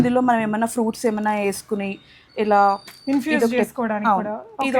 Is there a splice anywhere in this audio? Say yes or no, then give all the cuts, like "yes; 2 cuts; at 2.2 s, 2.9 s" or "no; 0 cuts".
no; 0 cuts